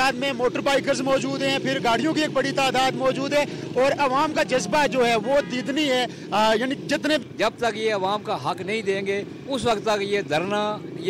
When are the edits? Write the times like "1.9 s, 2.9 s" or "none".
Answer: 7.2 s